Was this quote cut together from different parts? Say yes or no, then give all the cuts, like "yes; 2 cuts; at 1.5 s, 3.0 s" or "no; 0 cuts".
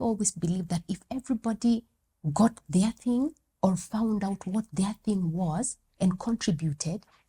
no; 0 cuts